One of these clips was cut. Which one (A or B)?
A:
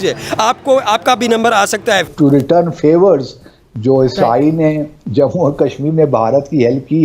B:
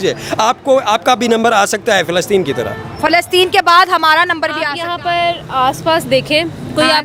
A